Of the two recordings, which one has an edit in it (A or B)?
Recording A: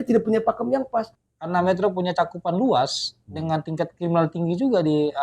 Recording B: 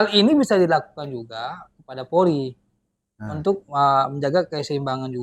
A